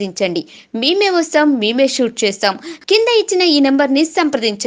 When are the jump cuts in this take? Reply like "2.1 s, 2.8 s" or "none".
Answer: none